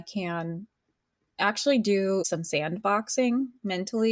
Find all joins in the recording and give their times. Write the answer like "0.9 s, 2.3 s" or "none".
2.3 s